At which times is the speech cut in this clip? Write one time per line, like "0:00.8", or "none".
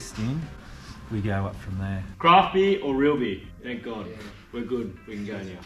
0:02.1
0:03.5

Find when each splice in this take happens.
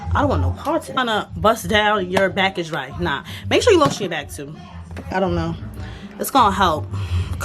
0:01.0
0:05.1

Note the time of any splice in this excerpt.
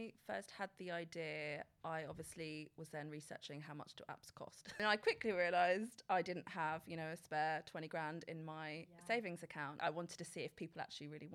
0:04.8
0:09.8

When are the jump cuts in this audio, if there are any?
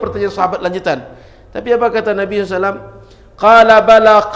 none

